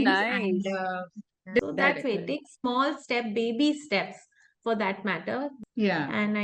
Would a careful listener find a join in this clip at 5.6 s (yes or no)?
yes